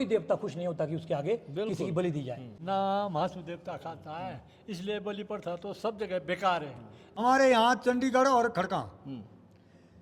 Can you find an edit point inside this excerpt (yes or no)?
yes